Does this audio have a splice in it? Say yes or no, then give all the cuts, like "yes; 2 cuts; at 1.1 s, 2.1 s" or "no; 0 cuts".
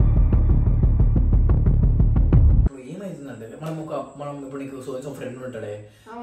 yes; 1 cut; at 2.7 s